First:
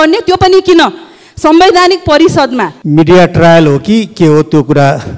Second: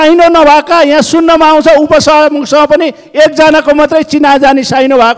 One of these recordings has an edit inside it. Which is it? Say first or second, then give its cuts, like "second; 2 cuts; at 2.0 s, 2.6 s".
first; 1 cut; at 2.8 s